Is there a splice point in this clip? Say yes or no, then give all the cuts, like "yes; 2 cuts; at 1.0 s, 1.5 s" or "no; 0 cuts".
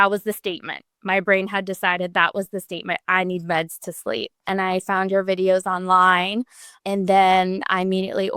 yes; 2 cuts; at 4.5 s, 6.7 s